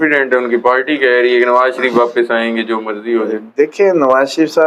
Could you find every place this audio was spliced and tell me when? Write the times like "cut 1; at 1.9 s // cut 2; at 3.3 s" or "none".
none